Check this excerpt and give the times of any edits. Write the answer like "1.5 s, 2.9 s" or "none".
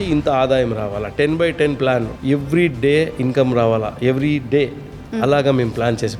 2.1 s